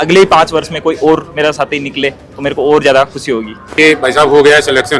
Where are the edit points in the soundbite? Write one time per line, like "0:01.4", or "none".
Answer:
0:03.6